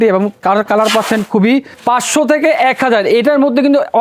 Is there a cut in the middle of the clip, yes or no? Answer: yes